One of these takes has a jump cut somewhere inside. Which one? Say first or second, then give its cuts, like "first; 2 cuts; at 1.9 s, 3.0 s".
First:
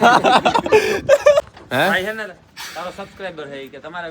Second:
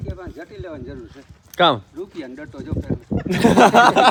first; 1 cut; at 1.5 s